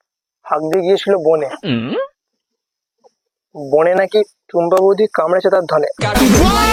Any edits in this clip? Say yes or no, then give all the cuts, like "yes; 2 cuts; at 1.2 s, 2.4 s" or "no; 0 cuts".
no; 0 cuts